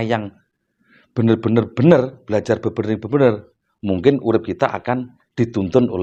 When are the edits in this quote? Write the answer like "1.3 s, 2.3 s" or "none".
none